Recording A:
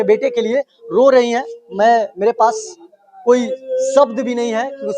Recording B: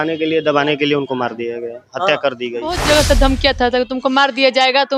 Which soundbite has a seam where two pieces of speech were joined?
B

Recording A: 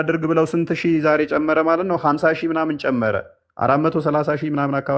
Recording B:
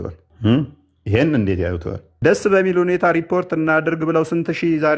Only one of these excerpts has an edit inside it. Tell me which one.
B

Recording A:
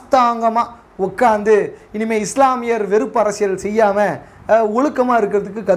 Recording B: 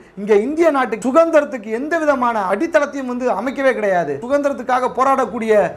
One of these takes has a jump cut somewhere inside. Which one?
B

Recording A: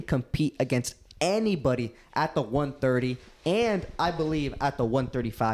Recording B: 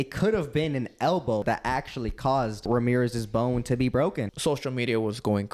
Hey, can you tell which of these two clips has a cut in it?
B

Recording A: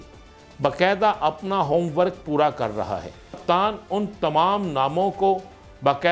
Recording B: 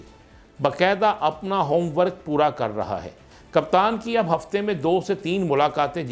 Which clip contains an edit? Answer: A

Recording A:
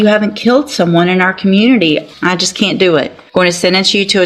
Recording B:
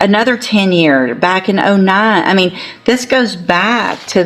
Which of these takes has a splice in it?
A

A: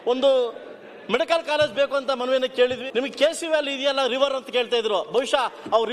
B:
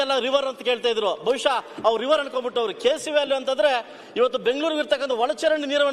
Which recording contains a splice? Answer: A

